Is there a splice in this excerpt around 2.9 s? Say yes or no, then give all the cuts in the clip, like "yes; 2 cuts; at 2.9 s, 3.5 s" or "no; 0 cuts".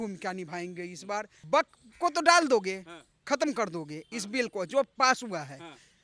no; 1 cut; at 1.4 s